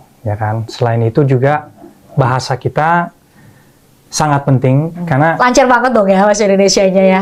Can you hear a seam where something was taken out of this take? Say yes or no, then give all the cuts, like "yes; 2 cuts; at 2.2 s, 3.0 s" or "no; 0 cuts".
no; 0 cuts